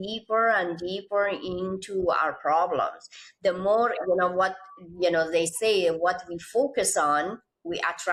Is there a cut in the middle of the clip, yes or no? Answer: no